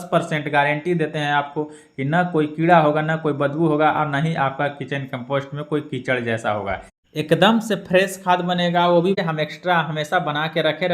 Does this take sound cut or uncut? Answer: cut